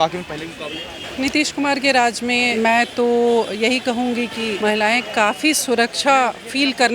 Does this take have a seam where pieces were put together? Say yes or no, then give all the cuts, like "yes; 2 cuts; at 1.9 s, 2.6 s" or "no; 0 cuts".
yes; 3 cuts; at 1.1 s, 2.5 s, 4.5 s